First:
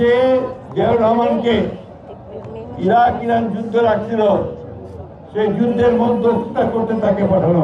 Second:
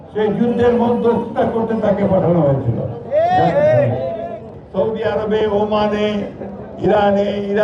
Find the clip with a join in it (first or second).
second